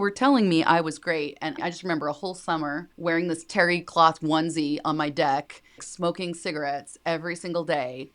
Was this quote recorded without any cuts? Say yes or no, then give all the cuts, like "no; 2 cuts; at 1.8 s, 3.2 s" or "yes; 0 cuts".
no; 3 cuts; at 1.6 s, 2.9 s, 5.8 s